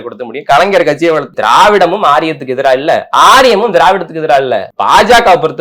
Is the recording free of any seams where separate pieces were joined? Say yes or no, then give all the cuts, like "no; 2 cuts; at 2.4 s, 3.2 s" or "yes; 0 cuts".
no; 2 cuts; at 1.3 s, 4.7 s